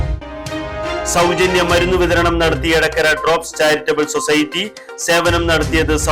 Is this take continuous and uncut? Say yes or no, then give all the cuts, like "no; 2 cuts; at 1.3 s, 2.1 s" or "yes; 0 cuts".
yes; 0 cuts